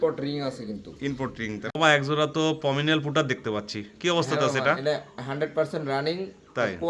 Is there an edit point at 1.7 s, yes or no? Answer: yes